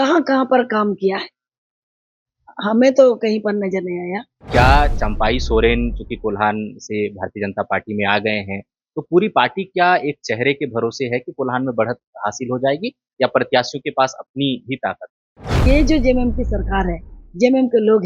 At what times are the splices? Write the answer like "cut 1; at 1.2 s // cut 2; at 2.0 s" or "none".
cut 1; at 4.4 s // cut 2; at 15.7 s